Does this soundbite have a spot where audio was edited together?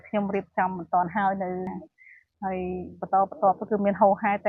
yes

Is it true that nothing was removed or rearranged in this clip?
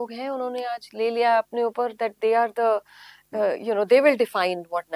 yes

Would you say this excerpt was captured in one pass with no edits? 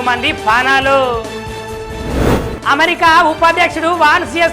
no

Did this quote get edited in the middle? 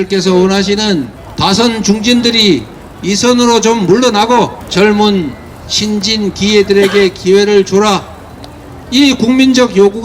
yes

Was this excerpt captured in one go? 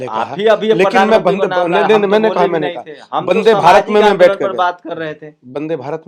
yes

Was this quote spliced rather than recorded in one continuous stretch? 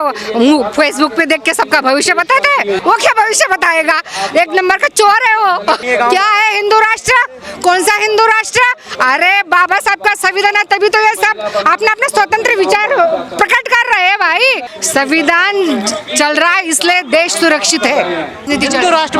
yes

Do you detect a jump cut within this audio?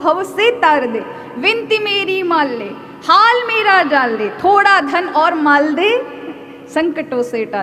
no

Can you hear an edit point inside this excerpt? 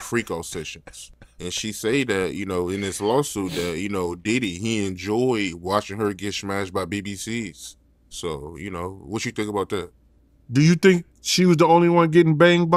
no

